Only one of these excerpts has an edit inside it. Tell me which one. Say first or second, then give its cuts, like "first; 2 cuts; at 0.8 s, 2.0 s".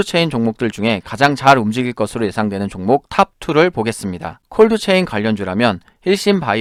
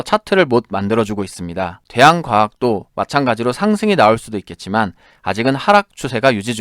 second; 1 cut; at 1.8 s